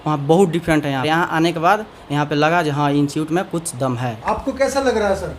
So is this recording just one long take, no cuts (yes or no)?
no